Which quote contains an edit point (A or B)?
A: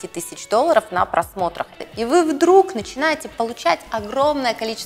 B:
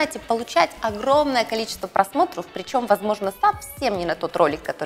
A